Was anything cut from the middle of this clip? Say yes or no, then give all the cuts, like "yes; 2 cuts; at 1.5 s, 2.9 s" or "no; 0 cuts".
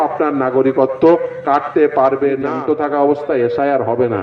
yes; 1 cut; at 2.5 s